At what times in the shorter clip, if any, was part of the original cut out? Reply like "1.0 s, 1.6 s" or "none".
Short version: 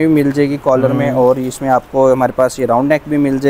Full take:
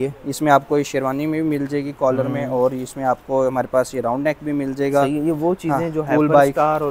none